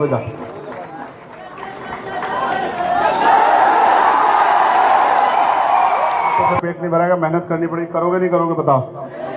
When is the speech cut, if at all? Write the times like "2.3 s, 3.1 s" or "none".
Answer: 6.5 s